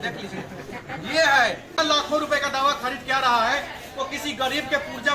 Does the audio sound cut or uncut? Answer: cut